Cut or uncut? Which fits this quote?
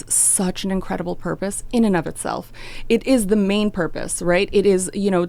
uncut